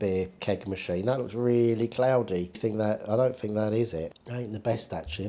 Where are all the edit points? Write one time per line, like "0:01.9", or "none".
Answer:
0:02.6
0:04.2